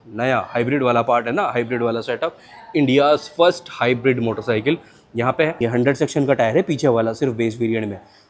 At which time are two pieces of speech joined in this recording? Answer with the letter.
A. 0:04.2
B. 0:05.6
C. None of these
B